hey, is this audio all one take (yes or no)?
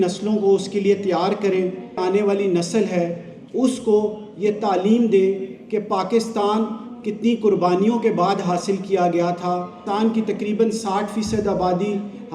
no